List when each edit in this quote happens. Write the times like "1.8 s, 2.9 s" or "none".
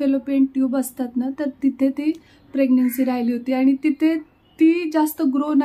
none